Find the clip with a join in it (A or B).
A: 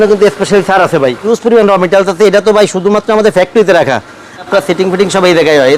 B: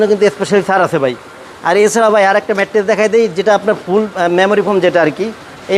A